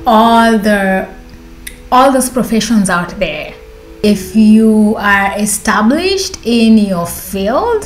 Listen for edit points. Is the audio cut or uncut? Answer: cut